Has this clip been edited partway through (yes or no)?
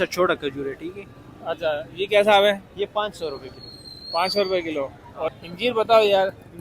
yes